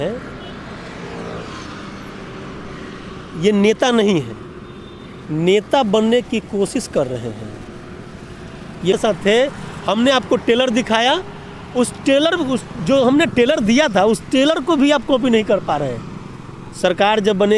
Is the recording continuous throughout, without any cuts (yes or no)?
no